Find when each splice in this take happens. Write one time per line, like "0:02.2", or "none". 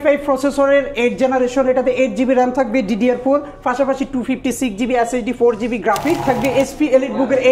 0:06.2